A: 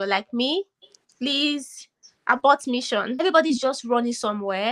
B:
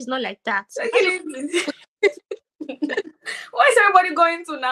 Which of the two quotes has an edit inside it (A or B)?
A